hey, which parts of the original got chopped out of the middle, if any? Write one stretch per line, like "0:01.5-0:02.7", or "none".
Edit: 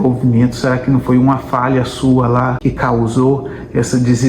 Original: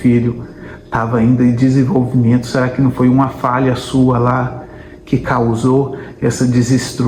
0:04.5-0:05.0